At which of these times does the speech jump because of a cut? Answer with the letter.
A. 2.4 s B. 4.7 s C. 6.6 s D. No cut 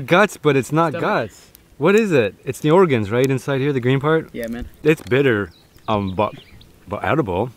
B